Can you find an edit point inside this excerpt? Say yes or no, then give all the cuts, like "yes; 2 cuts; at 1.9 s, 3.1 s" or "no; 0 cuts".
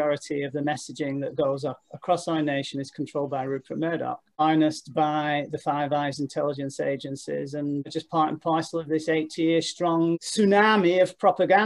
no; 0 cuts